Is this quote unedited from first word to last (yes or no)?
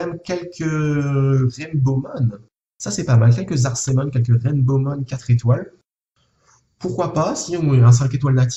yes